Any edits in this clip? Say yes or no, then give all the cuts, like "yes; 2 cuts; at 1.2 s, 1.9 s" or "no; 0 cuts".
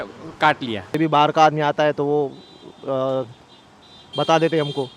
yes; 1 cut; at 1.0 s